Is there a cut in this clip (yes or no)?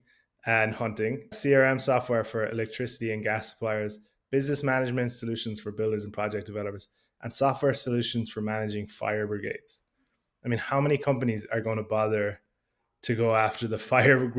yes